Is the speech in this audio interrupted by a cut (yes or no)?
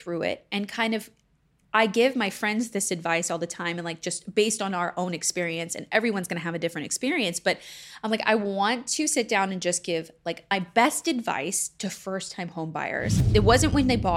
yes